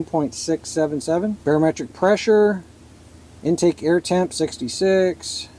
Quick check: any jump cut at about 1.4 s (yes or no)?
yes